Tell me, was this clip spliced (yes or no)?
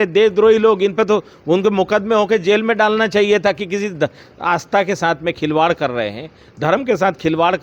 no